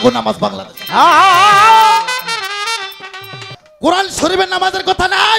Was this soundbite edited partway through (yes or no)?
yes